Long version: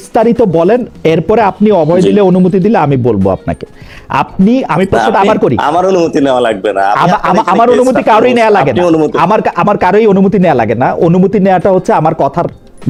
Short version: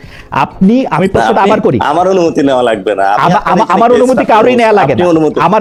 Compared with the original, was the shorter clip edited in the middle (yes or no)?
no